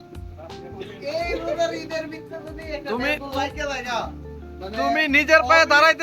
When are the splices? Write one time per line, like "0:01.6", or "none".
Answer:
none